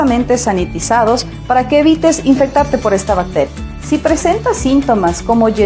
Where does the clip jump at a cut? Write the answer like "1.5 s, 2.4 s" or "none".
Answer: none